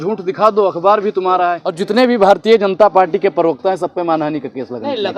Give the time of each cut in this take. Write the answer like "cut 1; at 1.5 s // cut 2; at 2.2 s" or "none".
cut 1; at 1.7 s